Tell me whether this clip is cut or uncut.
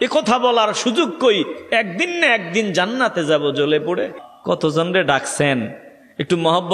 cut